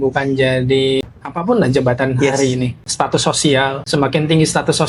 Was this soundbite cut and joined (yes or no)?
yes